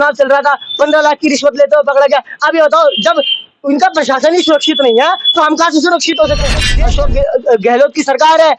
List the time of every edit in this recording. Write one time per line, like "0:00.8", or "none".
0:06.7